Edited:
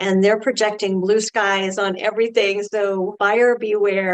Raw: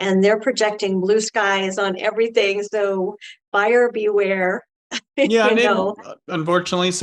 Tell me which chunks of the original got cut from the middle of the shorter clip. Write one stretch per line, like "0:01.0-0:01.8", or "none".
0:03.1-0:03.5